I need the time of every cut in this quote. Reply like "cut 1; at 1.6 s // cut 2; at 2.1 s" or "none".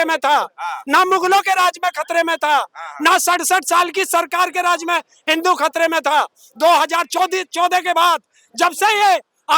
none